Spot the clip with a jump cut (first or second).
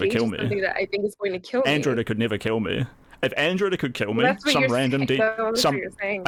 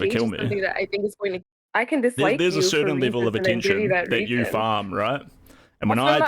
second